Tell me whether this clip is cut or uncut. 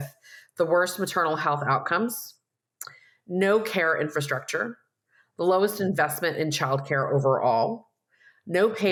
uncut